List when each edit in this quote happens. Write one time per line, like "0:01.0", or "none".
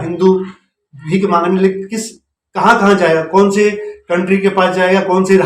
none